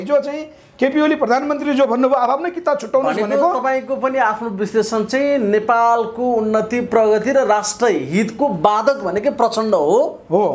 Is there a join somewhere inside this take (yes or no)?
no